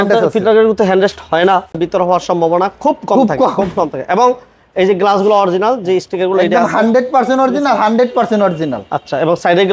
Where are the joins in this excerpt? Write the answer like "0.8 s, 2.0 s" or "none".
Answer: 1.8 s